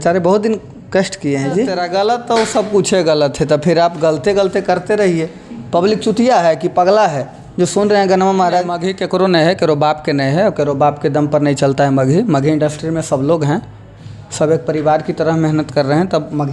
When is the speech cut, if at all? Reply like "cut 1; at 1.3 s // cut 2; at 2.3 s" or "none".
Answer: cut 1; at 1.8 s // cut 2; at 8.8 s